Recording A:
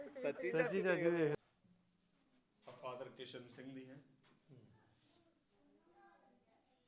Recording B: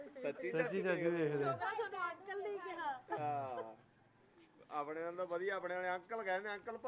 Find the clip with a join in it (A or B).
A